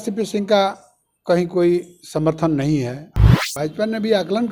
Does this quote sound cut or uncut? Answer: cut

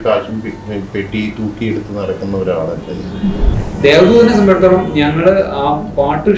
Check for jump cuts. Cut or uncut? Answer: cut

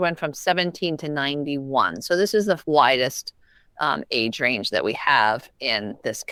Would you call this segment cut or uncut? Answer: uncut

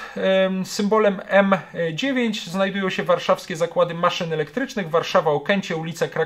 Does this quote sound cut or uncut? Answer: uncut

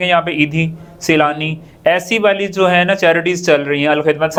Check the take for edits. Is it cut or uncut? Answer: uncut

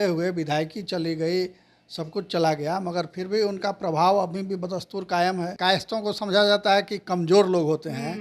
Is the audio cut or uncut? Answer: cut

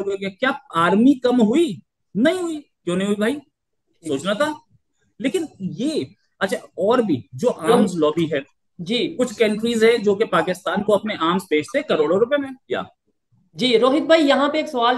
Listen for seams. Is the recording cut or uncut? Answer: uncut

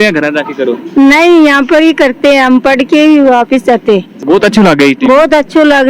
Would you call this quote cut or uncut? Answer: uncut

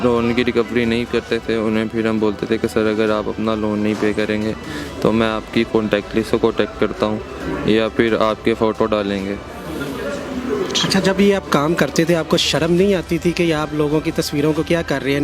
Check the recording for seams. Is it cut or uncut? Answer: uncut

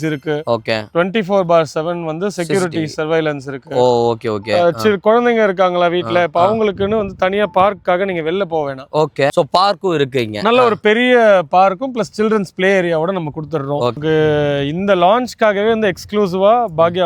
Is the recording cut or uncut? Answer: cut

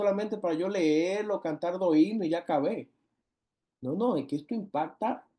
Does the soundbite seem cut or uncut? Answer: uncut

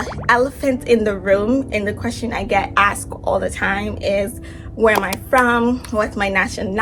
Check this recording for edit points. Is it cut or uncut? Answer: uncut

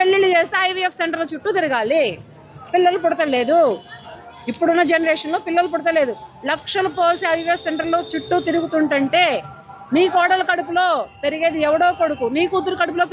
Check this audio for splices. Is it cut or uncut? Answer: uncut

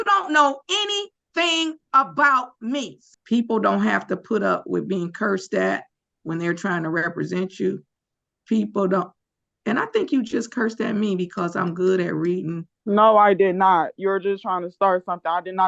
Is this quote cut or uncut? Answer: cut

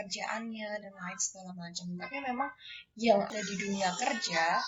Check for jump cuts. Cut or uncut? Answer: uncut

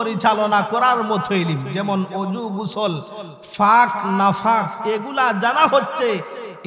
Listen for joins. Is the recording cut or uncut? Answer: uncut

